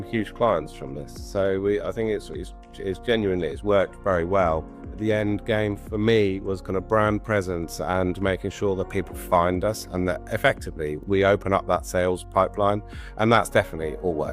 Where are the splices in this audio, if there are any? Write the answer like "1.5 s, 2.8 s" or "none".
5.0 s, 11.0 s